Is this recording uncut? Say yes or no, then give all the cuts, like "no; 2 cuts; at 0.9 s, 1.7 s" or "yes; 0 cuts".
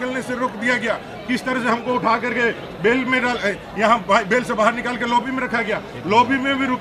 yes; 0 cuts